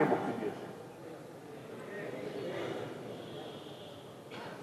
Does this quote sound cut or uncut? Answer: uncut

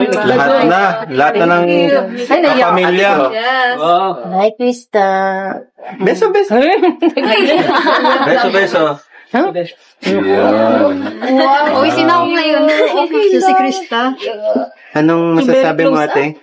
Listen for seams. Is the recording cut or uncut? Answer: uncut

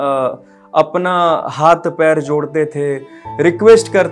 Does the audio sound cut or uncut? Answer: uncut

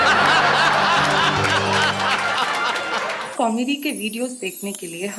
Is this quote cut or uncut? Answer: cut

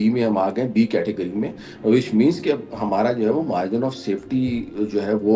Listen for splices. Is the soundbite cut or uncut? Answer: uncut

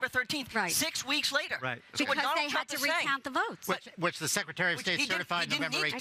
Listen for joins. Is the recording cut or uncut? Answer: cut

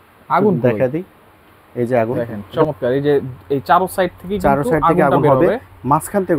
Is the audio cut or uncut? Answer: cut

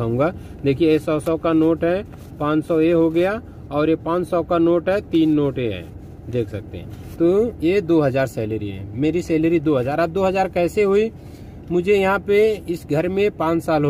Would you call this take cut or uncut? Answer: uncut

